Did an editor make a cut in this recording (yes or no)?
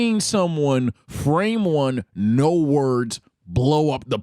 no